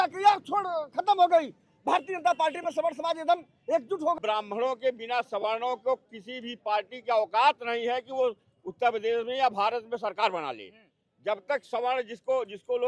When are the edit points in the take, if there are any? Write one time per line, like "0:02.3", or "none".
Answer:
0:04.2